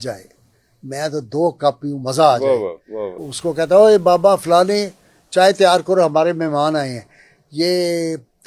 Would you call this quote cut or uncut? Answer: cut